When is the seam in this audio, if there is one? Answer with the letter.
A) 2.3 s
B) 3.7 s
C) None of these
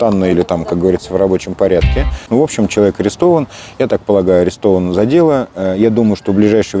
A